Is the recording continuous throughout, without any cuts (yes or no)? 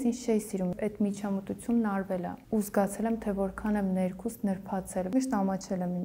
no